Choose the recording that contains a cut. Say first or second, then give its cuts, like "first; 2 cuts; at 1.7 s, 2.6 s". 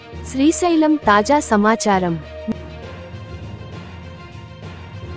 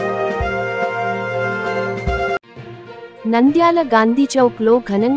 second; 2 cuts; at 1.1 s, 1.9 s